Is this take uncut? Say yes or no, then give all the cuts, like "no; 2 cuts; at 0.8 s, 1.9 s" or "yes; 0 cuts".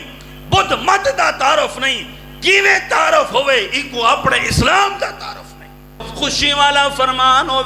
no; 1 cut; at 6.1 s